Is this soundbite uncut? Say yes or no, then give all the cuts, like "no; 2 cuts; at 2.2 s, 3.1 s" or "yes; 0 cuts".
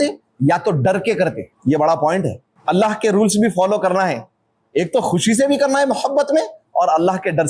no; 2 cuts; at 1.5 s, 2.5 s